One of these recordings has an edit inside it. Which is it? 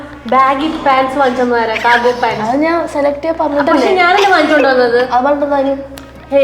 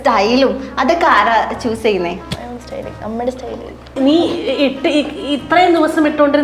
second; 2 cuts; at 2.2 s, 3.9 s

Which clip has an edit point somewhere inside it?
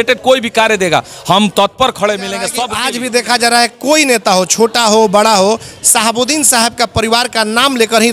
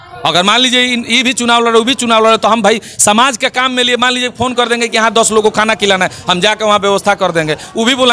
first; 1 cut; at 2.7 s

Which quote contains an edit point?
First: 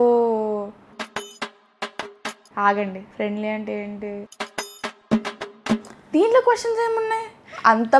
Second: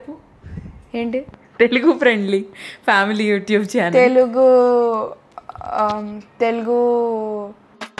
first; 1 cut; at 5.8 s

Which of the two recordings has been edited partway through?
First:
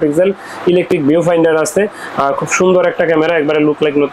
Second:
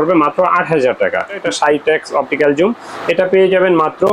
second; 1 cut; at 1.3 s

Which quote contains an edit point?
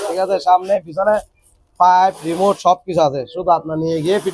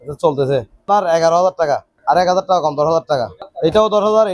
second; 3 cuts; at 0.8 s, 1.9 s, 3.4 s

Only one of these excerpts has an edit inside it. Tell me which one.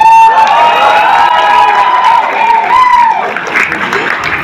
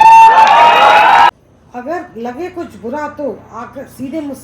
second; 1 cut; at 1.3 s

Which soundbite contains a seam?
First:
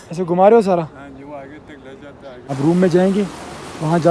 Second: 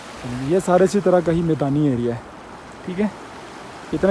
first; 1 cut; at 2.5 s

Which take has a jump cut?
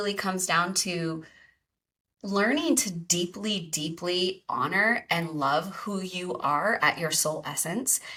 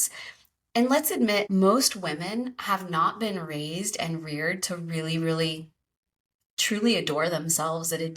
second; 1 cut; at 1.5 s

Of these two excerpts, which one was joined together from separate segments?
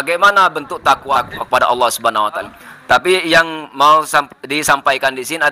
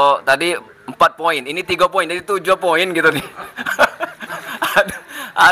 first; 2 cuts; at 1.2 s, 2.5 s

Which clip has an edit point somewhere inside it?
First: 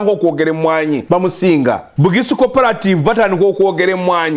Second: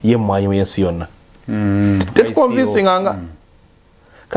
first; 2 cuts; at 1.0 s, 1.9 s

